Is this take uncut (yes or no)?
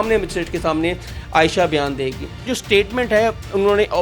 no